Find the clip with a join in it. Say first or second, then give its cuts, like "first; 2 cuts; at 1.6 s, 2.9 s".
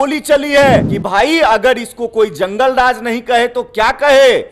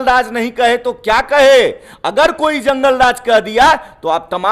first; 1 cut; at 1.0 s